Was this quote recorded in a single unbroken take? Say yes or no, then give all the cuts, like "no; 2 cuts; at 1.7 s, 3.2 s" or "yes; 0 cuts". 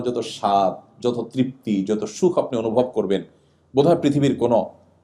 yes; 0 cuts